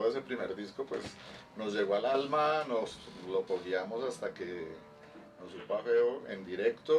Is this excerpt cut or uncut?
uncut